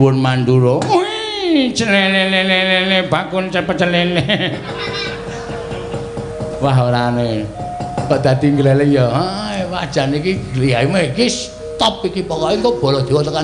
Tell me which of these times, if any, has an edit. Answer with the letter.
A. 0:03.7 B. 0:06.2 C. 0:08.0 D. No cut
B